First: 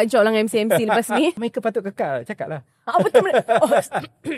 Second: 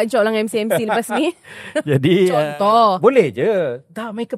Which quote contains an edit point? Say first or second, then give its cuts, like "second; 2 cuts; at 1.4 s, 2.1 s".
first; 1 cut; at 1.5 s